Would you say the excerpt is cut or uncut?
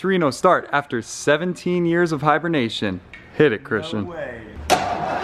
uncut